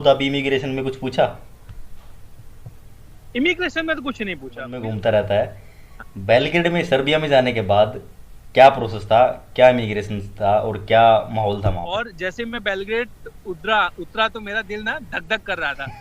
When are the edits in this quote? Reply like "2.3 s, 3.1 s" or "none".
4.7 s, 12.1 s